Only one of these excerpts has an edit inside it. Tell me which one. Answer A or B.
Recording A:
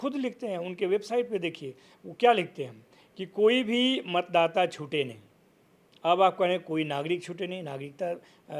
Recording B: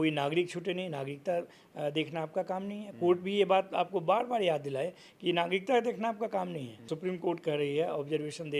B